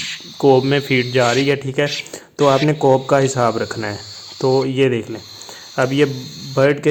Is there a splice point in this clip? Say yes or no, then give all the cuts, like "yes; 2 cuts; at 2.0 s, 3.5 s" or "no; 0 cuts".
no; 0 cuts